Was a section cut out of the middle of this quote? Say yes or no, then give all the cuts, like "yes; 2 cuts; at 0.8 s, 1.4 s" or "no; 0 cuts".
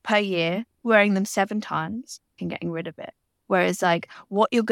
yes; 1 cut; at 2.4 s